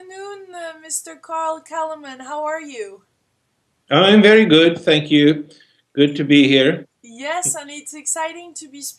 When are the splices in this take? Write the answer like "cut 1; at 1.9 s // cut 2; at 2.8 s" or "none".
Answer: none